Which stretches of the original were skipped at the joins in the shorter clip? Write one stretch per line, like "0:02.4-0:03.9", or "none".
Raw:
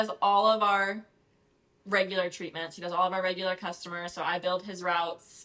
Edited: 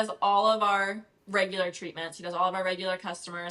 0:01.1-0:01.7